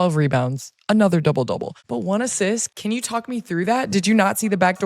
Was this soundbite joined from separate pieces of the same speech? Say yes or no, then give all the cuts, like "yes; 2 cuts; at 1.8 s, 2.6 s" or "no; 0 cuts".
yes; 2 cuts; at 1.8 s, 2.7 s